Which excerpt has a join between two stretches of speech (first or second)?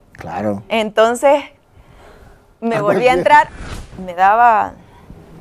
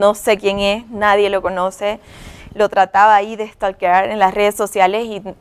first